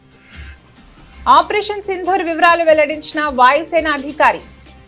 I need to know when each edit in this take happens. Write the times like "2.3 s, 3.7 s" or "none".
1.2 s